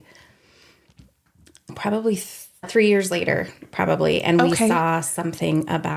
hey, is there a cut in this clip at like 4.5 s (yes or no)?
no